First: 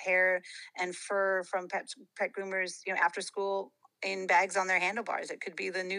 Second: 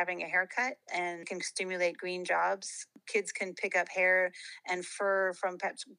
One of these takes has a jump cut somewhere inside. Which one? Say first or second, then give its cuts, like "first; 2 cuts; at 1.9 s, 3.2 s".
second; 2 cuts; at 1.4 s, 2.9 s